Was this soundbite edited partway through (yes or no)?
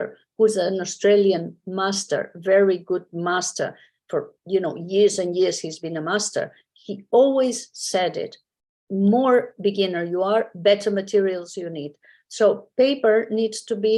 no